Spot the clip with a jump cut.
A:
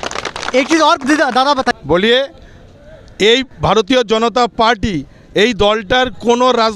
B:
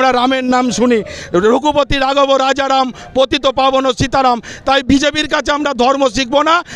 A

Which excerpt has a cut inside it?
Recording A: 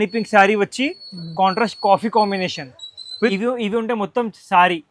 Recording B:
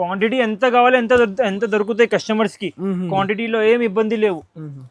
A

